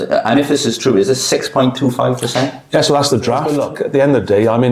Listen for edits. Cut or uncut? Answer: cut